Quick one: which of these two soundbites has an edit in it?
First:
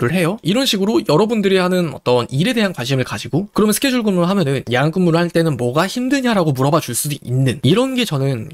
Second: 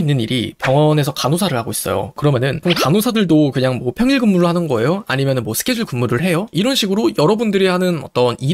second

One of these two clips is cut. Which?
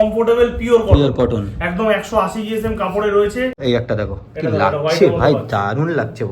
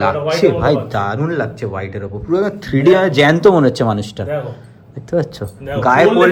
first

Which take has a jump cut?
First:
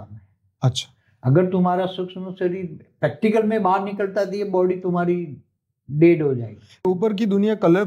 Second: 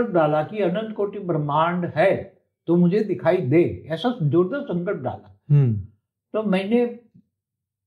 first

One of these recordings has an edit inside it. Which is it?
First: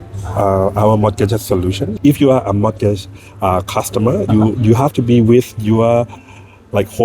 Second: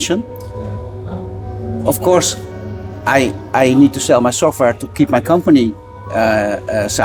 first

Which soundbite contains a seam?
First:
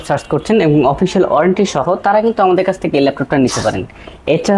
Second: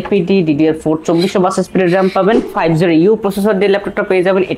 second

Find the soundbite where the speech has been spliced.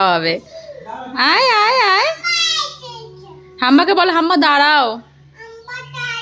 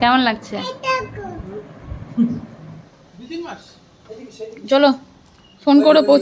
second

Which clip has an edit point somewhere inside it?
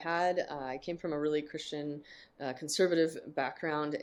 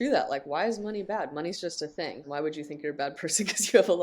second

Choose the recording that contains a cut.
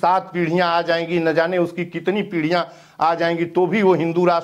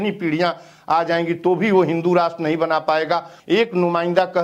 second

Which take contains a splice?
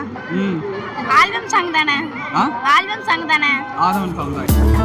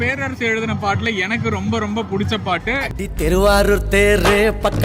second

